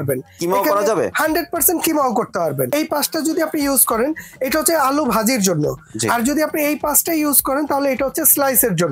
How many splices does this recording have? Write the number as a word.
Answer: one